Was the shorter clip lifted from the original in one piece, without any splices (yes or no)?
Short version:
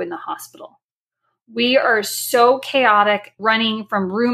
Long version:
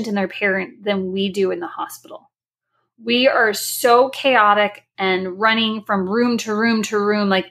no